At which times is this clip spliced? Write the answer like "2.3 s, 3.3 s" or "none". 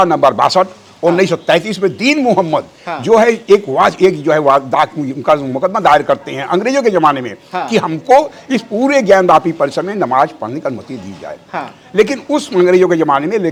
none